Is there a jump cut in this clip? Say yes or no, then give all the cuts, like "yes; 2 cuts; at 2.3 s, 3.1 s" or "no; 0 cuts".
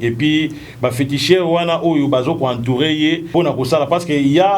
yes; 1 cut; at 3.2 s